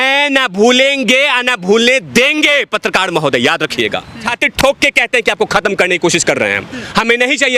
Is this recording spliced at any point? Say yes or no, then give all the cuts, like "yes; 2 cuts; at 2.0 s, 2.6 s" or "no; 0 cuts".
yes; 1 cut; at 4.3 s